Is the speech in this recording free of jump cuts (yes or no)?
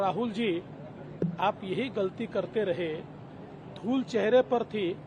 yes